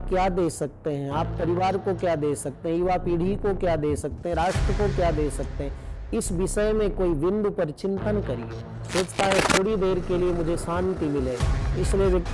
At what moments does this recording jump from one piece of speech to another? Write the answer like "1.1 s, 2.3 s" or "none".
8.7 s